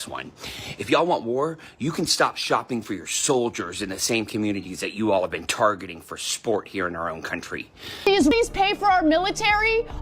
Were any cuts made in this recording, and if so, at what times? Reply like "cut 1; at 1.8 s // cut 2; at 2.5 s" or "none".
cut 1; at 8.2 s